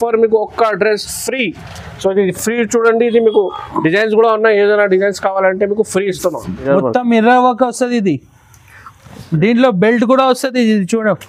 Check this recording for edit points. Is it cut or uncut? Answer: cut